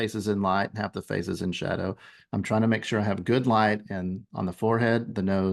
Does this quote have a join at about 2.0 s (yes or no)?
no